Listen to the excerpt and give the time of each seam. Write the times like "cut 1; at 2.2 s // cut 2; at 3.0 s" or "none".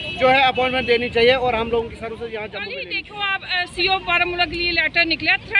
cut 1; at 2.9 s